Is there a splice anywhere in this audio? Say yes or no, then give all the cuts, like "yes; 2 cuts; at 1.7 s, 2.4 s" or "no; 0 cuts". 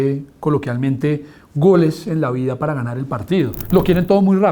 yes; 1 cut; at 3.6 s